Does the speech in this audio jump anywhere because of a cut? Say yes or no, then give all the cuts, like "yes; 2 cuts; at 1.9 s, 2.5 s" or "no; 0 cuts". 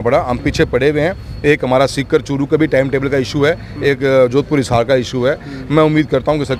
no; 0 cuts